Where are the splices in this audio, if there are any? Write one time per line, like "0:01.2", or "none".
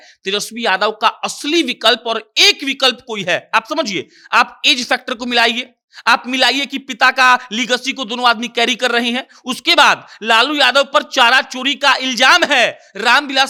none